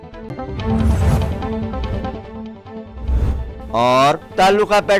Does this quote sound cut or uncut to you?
uncut